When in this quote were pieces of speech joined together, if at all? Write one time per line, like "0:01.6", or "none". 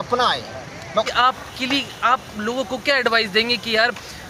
0:01.1